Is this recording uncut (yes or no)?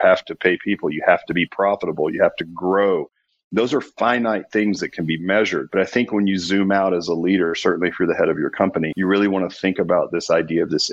yes